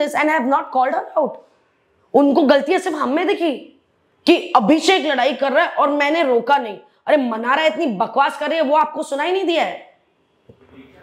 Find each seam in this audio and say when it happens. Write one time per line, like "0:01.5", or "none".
none